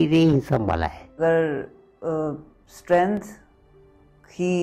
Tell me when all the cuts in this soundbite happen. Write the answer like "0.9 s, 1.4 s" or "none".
1.2 s